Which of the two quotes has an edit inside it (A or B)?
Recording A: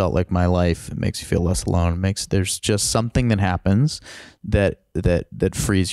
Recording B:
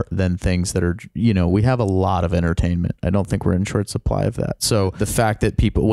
B